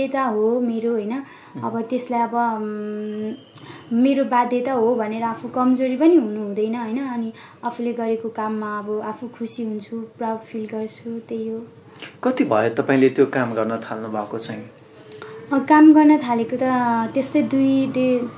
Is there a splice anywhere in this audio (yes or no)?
no